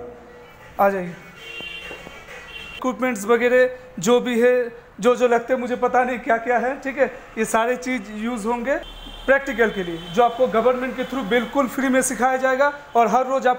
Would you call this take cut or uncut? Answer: cut